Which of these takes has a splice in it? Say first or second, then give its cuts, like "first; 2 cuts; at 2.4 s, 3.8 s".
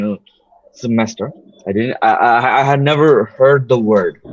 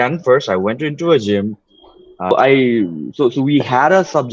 second; 1 cut; at 2.3 s